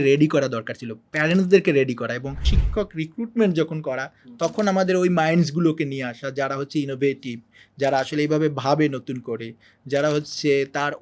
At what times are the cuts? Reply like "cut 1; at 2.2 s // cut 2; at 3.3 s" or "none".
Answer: cut 1; at 2.5 s